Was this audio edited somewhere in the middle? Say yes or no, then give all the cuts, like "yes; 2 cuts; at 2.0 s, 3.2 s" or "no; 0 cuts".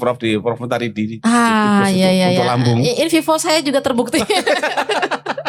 no; 0 cuts